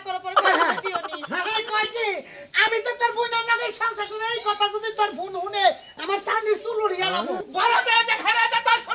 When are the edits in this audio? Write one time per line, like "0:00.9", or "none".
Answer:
0:07.4